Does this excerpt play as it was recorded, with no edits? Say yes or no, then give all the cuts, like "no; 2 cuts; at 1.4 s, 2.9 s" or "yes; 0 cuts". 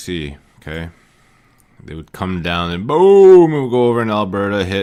yes; 0 cuts